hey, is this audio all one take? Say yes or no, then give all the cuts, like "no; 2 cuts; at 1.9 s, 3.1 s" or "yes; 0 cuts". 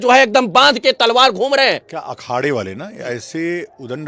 no; 1 cut; at 1.9 s